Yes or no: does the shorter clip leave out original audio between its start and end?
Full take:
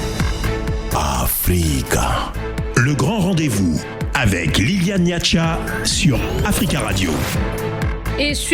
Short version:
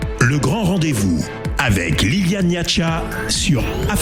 no